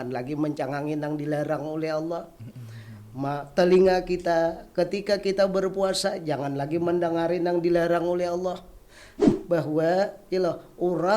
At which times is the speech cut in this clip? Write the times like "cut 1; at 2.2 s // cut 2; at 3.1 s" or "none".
cut 1; at 9.2 s